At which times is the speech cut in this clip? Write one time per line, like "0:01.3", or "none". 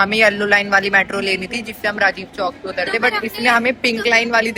none